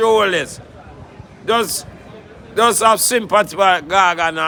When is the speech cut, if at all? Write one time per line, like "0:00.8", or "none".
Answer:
none